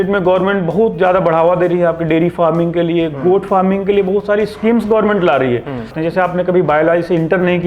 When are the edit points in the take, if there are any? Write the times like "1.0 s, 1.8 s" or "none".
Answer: 5.9 s